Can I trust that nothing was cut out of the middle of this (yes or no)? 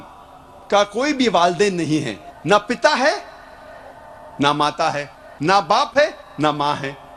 yes